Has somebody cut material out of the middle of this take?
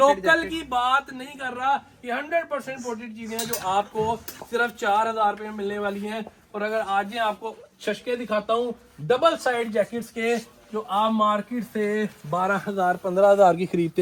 no; 0 cuts

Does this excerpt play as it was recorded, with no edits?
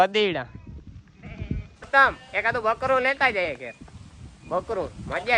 no; 1 cut; at 1.9 s

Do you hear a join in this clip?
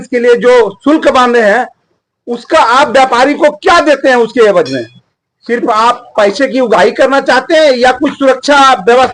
no; 0 cuts

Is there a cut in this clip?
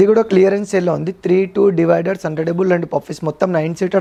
no; 0 cuts

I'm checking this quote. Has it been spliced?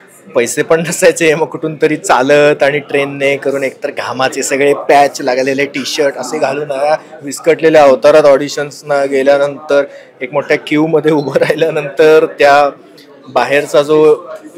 no; 0 cuts

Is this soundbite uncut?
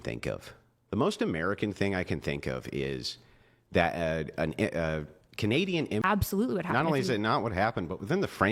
no; 1 cut; at 6.0 s

